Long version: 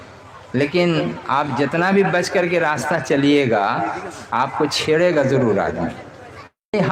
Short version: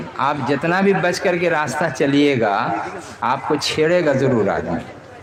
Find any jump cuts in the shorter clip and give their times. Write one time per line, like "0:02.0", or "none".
none